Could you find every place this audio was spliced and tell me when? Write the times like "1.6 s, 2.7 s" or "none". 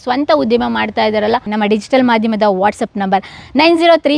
1.5 s